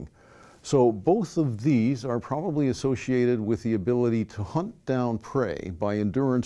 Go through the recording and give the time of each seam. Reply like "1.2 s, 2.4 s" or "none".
2.7 s